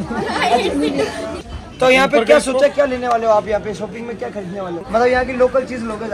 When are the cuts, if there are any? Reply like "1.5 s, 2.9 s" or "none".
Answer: 1.5 s, 4.8 s